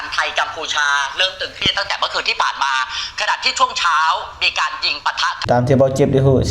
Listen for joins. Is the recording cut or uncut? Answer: cut